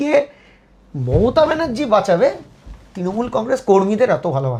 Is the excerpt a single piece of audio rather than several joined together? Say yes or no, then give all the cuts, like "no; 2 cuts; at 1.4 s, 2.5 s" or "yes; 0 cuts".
yes; 0 cuts